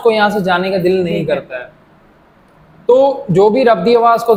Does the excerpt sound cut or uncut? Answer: uncut